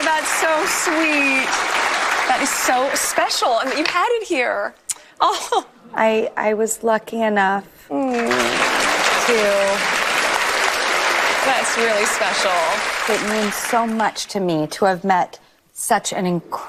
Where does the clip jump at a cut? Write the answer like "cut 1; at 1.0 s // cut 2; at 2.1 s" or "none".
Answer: none